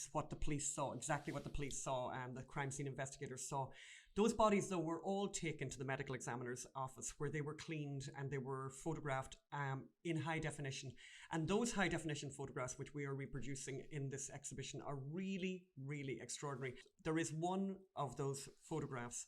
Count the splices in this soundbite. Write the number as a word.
one